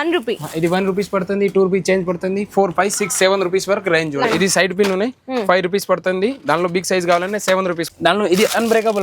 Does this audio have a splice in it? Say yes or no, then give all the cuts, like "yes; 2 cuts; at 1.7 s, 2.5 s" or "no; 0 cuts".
yes; 2 cuts; at 4.2 s, 7.8 s